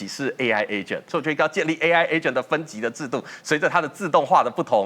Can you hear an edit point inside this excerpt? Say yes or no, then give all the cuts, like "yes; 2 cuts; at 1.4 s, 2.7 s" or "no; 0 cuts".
yes; 1 cut; at 1.1 s